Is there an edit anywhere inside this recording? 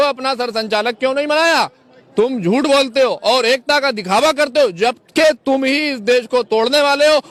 no; 0 cuts

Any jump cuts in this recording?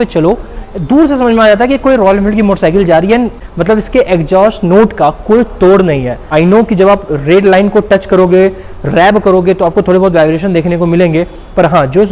yes; 2 cuts; at 3.5 s, 6.2 s

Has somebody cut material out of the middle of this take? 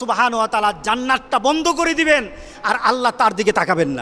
no; 0 cuts

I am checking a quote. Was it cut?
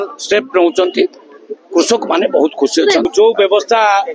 yes; 1 cut; at 3.1 s

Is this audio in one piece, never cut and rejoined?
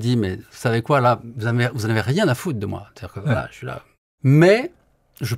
no; 1 cut; at 4.0 s

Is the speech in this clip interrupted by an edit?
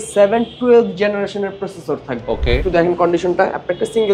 yes; 1 cut; at 2.6 s

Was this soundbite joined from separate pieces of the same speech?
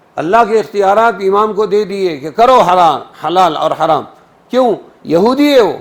no; 0 cuts

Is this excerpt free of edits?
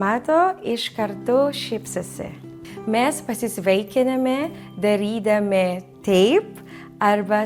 yes; 0 cuts

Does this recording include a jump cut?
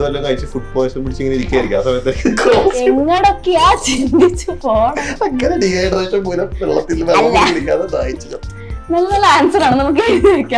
no; 0 cuts

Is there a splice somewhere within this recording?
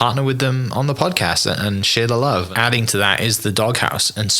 yes; 1 cut; at 2.5 s

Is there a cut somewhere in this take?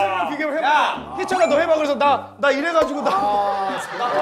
no; 0 cuts

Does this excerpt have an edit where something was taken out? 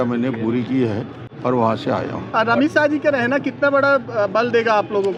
no; 0 cuts

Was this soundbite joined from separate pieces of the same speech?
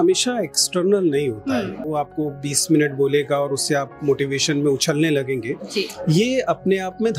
yes; 1 cut; at 1.8 s

